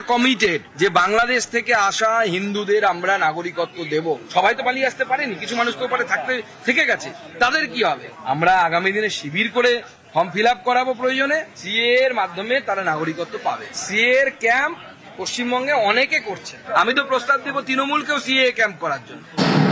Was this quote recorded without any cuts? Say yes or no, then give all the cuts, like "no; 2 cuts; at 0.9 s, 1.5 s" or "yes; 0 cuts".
yes; 0 cuts